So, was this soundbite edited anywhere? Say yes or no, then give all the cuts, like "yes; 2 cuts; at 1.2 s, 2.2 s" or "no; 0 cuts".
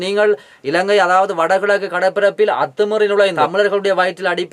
yes; 1 cut; at 3.3 s